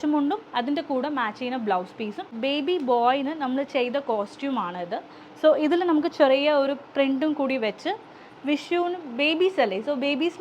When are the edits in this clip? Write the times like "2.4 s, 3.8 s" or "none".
2.3 s